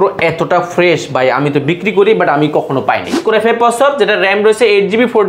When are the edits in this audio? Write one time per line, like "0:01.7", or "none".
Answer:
0:03.1